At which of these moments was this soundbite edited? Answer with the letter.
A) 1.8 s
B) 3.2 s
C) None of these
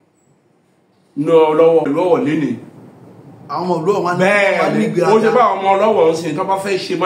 A